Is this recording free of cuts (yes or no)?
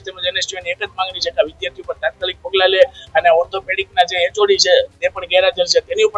yes